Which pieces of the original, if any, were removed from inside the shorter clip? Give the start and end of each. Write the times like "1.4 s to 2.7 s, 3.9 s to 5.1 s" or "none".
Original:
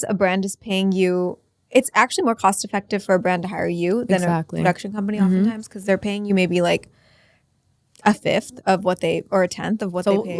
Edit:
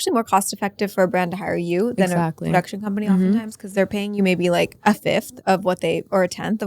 6.9 s to 7.9 s